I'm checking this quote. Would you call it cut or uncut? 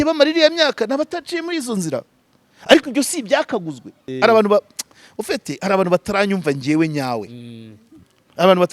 cut